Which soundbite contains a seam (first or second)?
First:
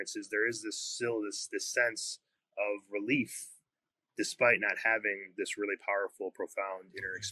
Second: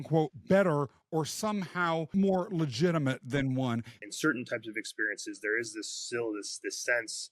second